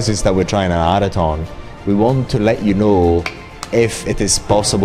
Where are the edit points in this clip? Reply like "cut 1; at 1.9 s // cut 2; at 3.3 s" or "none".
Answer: none